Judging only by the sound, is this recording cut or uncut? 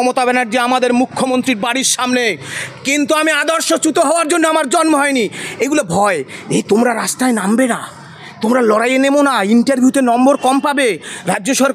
uncut